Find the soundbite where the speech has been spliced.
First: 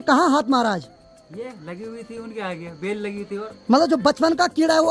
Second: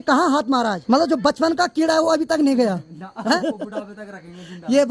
second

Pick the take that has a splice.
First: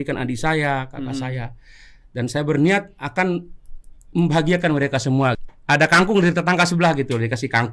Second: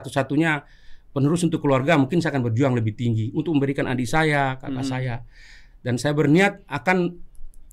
first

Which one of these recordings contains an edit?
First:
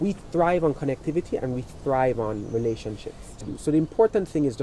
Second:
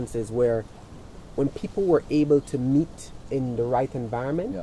first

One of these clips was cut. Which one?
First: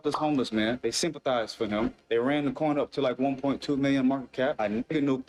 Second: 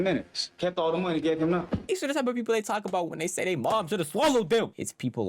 second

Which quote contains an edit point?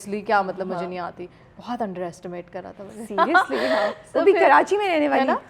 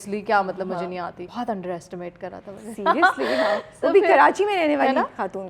second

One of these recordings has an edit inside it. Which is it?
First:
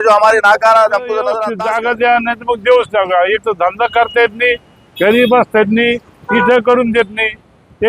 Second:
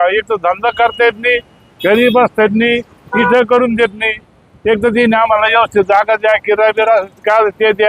first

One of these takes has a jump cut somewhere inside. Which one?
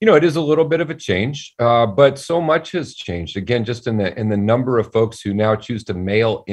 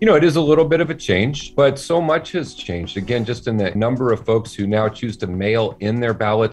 second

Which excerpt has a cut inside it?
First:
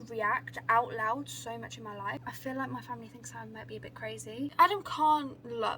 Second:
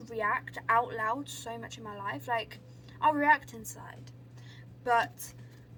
first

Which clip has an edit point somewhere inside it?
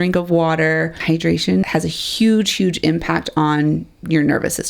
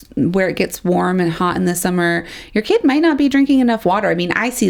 first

